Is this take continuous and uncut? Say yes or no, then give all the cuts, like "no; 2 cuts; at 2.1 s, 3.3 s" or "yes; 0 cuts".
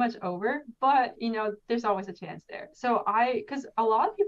no; 1 cut; at 2.7 s